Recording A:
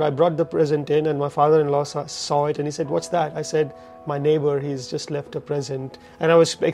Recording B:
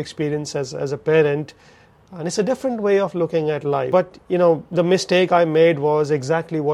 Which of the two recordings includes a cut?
B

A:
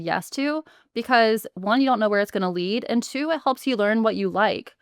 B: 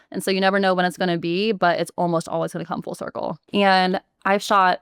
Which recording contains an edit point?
B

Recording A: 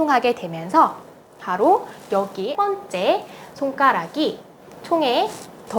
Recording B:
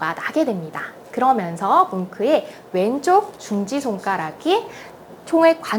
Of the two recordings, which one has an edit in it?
A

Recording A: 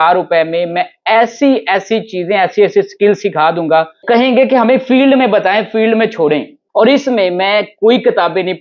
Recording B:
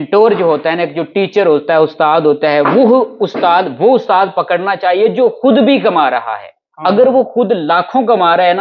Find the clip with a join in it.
A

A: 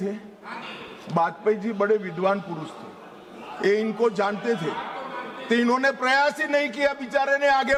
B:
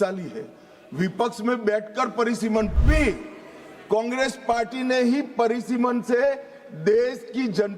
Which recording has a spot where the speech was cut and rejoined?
B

